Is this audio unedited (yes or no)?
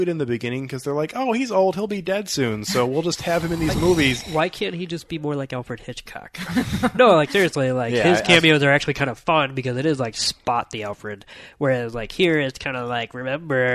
yes